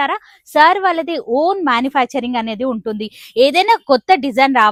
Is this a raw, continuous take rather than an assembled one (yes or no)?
yes